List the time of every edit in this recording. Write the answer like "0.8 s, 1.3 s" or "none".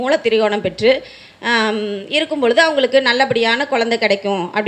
none